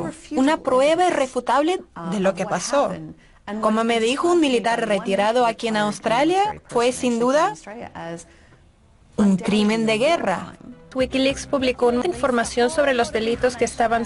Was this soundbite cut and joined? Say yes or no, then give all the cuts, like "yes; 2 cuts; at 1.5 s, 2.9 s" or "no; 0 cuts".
yes; 2 cuts; at 10.8 s, 12.0 s